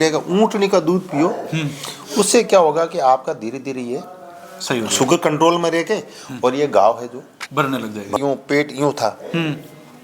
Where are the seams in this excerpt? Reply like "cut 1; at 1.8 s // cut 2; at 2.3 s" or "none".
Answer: cut 1; at 8.2 s